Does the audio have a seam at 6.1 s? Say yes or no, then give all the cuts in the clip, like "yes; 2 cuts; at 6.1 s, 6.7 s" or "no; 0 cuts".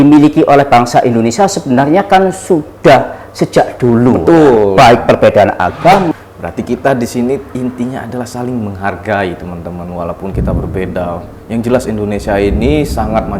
yes; 1 cut; at 6.1 s